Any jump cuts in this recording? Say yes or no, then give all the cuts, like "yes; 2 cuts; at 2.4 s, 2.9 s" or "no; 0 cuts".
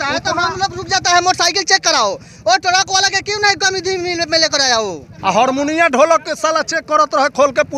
yes; 1 cut; at 5.1 s